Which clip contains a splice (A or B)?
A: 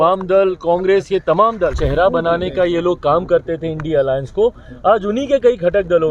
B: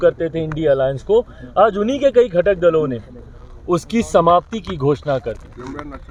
A